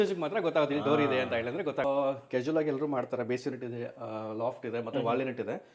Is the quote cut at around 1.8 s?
yes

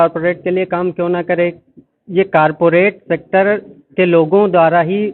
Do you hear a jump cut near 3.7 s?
no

